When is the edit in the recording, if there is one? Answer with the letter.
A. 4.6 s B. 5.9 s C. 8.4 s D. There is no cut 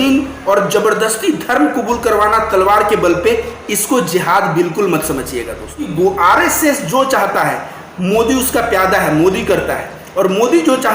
B